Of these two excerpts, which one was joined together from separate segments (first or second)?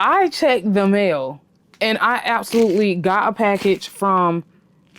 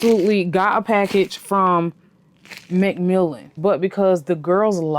second